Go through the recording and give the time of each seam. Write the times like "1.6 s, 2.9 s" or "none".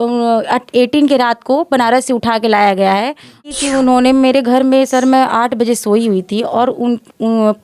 3.5 s